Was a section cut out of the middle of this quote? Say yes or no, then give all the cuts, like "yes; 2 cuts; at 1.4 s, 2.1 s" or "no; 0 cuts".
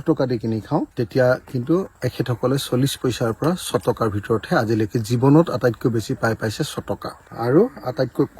yes; 2 cuts; at 1.0 s, 7.2 s